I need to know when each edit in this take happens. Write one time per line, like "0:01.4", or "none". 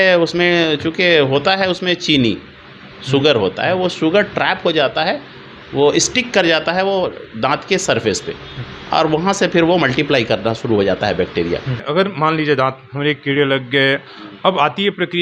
0:11.8